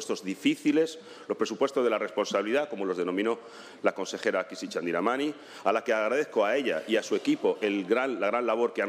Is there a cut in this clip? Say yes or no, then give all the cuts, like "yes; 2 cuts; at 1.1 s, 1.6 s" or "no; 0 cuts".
no; 0 cuts